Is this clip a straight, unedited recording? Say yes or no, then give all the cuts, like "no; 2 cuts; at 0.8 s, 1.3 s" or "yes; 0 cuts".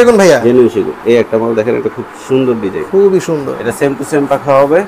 no; 1 cut; at 3.6 s